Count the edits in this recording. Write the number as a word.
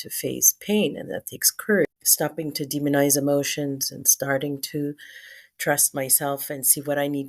one